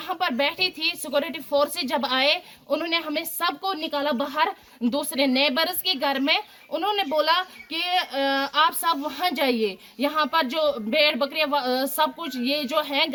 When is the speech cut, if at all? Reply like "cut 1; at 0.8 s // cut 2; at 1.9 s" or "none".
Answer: none